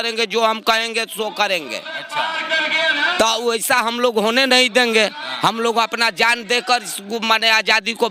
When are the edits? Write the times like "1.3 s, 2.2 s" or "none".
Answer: none